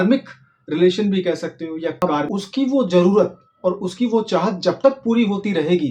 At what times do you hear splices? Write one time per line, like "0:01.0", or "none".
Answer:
0:02.3